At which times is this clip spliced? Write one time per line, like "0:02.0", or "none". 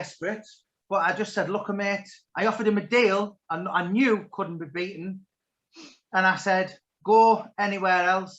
0:02.2

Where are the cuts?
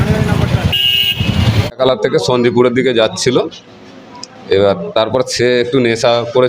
0:01.8

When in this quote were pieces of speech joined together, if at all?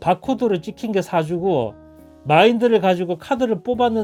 none

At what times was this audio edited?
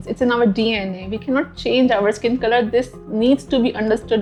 none

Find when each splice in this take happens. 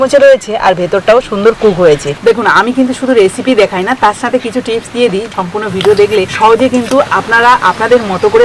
0:02.1
0:05.3

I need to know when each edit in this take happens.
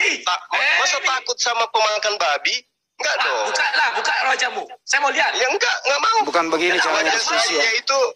none

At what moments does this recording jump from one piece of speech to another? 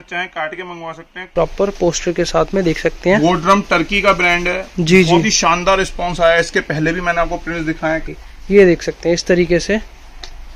0:01.3
0:08.0

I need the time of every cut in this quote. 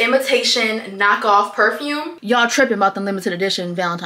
0:02.1

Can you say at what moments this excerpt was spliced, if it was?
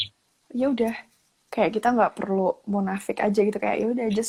none

